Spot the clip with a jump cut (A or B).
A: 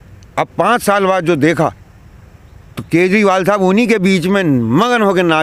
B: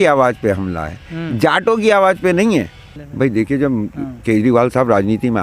B